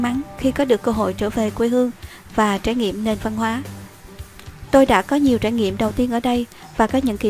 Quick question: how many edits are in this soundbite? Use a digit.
1